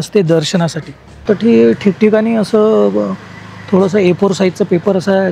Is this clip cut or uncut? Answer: cut